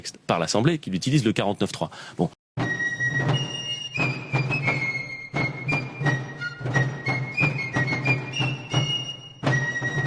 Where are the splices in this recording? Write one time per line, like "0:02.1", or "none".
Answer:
0:02.4